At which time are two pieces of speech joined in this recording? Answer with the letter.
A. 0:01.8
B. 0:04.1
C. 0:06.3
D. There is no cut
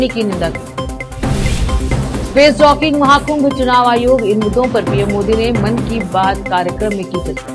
D